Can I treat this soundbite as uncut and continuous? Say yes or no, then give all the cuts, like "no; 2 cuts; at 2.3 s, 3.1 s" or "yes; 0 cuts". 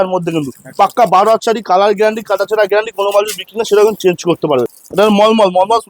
no; 1 cut; at 4.8 s